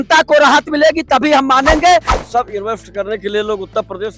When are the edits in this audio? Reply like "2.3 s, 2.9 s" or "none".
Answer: 2.1 s